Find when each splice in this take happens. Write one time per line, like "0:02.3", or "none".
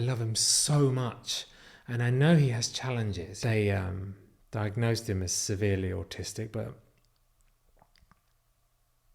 0:03.3